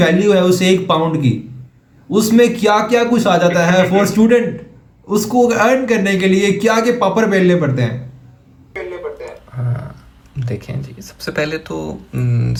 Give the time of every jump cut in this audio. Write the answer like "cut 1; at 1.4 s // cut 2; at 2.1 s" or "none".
none